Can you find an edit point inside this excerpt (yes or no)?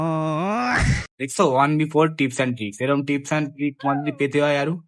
yes